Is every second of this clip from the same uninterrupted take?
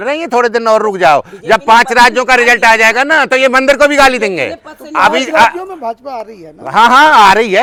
yes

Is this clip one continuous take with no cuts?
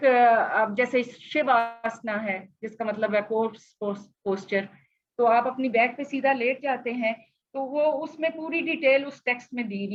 yes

